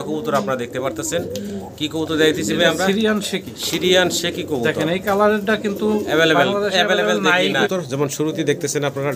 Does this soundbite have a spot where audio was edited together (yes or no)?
yes